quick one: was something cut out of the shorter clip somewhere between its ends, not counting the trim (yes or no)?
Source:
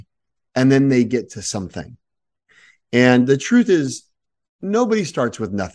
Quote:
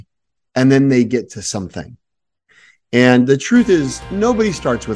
yes